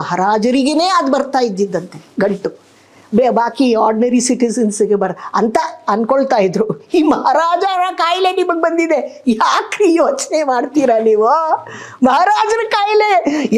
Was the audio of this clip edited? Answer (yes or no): no